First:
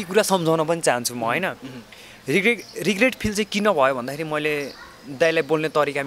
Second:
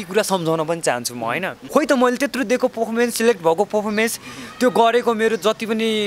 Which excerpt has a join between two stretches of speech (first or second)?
second